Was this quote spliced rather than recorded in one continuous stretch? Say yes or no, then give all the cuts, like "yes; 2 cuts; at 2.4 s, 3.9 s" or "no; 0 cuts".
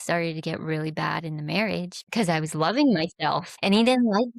yes; 2 cuts; at 2.2 s, 3.5 s